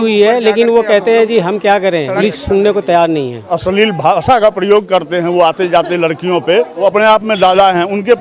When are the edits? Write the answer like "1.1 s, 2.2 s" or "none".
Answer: 2.1 s, 3.5 s, 6.8 s

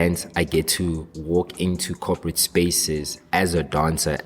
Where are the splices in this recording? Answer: 1.1 s

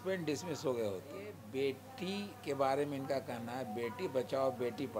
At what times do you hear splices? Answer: 1.4 s

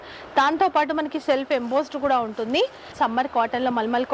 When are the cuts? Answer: 2.9 s

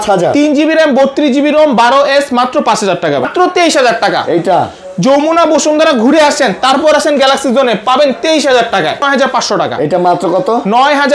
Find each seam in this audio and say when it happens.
3.2 s, 9.0 s

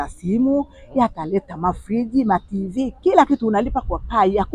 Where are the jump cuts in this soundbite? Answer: none

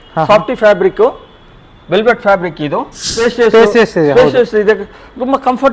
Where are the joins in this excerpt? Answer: 3.1 s

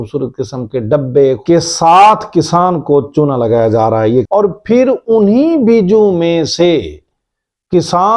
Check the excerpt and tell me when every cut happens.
1.4 s, 4.3 s

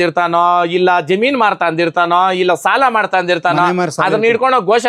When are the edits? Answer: none

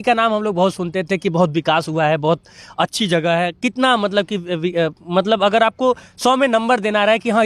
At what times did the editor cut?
none

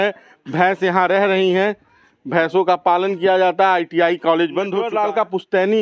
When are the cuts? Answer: 4.8 s

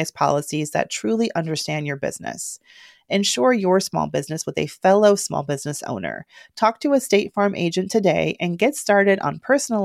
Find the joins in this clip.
none

